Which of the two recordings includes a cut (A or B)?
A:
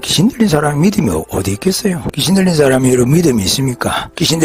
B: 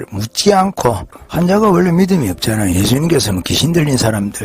B